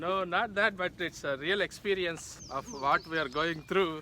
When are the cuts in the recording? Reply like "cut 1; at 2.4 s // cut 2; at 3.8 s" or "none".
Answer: cut 1; at 2.3 s

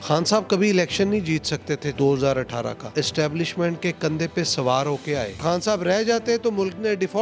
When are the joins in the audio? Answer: cut 1; at 1.9 s // cut 2; at 2.9 s // cut 3; at 5.4 s

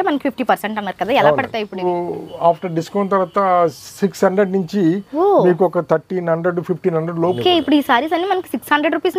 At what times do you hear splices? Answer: cut 1; at 1.8 s // cut 2; at 7.4 s

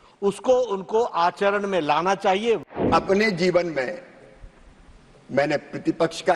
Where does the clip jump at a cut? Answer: cut 1; at 2.8 s

